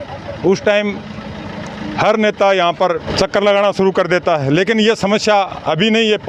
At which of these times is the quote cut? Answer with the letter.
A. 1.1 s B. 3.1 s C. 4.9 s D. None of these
B